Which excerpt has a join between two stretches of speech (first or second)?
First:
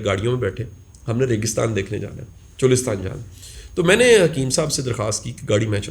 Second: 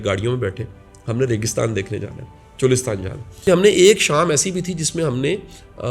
second